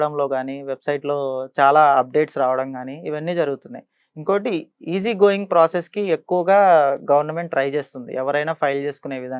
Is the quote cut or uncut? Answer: uncut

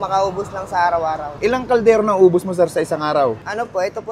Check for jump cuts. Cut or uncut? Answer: uncut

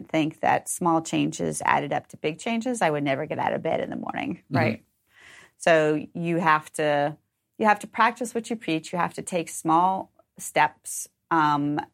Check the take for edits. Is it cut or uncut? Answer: uncut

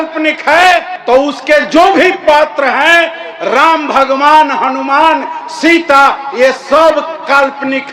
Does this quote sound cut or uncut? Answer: uncut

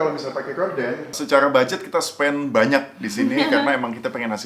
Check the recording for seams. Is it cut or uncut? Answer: cut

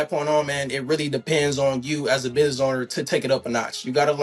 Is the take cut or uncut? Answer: uncut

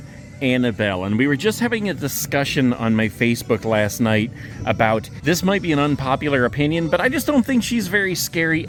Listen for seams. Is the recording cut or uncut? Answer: uncut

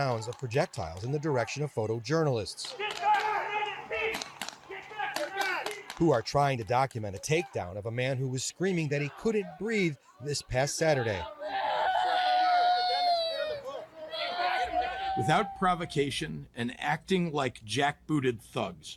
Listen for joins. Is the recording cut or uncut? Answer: uncut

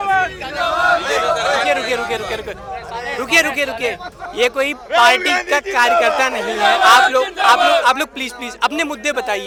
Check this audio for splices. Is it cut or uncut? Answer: uncut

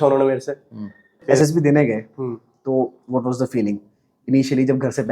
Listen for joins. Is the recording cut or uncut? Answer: cut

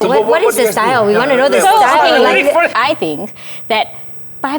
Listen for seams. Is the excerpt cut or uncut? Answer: cut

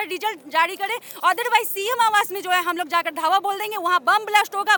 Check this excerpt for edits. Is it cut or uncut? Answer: uncut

